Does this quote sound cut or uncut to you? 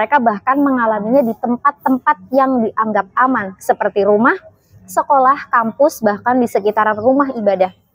uncut